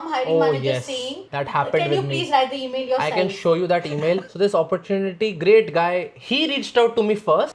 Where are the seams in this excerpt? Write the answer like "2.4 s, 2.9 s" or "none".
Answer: 4.3 s